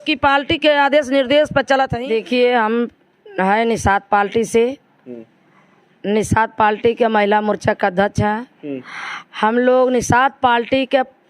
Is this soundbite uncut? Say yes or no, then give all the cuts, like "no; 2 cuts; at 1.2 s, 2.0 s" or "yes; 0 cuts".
no; 1 cut; at 1.9 s